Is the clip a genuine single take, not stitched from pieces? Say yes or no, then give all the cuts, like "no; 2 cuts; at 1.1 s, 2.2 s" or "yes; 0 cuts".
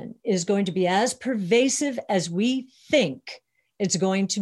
yes; 0 cuts